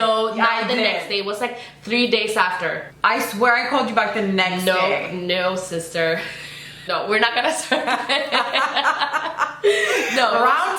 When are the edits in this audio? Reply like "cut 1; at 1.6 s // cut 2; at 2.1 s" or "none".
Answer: cut 1; at 2.9 s // cut 2; at 6.7 s

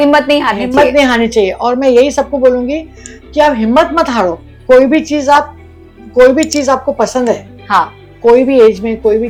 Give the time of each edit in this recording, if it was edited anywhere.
none

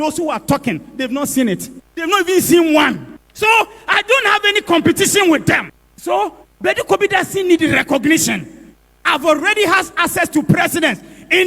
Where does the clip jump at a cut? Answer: cut 1; at 5.8 s

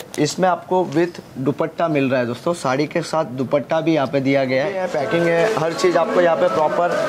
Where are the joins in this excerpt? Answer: cut 1; at 4.8 s

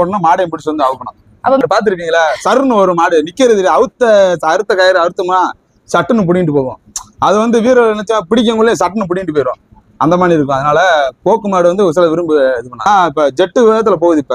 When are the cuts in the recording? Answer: cut 1; at 1.6 s // cut 2; at 12.8 s

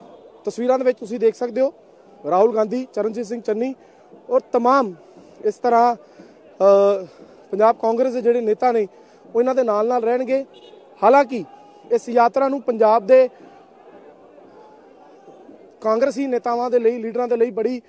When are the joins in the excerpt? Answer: none

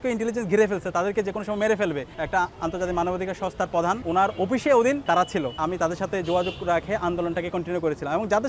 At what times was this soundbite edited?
cut 1; at 2.1 s // cut 2; at 5.5 s

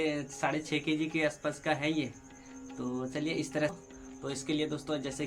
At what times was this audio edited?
cut 1; at 3.8 s

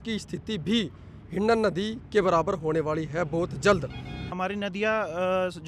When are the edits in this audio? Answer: cut 1; at 4.3 s

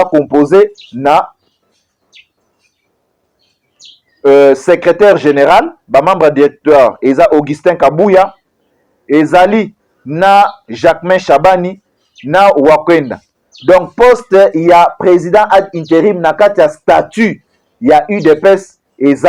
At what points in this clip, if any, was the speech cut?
none

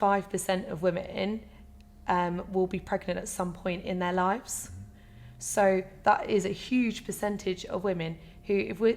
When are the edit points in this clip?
none

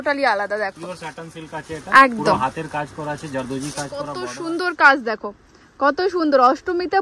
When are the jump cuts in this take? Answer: cut 1; at 4.2 s

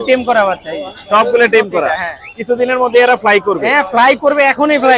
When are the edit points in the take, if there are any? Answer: none

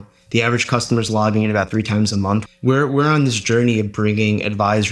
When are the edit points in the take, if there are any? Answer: cut 1; at 2.5 s

